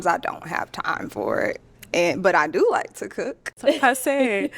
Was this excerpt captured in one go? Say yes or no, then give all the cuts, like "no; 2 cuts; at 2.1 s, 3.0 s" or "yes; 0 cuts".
no; 1 cut; at 3.5 s